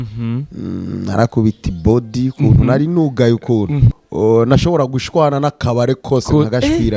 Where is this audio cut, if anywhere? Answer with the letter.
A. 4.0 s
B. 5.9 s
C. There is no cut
A